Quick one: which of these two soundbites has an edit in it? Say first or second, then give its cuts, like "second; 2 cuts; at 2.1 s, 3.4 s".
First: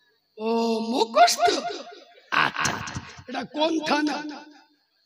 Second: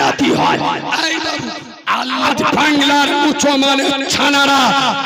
second; 1 cut; at 2.2 s